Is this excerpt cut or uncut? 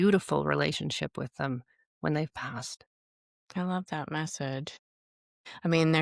uncut